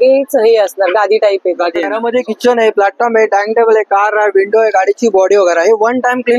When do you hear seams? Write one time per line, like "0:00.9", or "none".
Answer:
0:02.0